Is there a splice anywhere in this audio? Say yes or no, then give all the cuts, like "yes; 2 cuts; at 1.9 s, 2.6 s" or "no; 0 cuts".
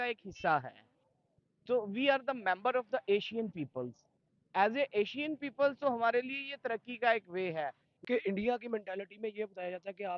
yes; 1 cut; at 8.0 s